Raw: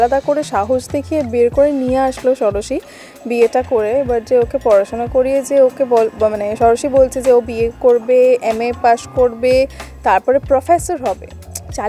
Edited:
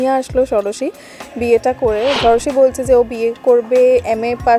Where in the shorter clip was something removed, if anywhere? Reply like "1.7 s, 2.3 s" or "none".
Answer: 2.2 s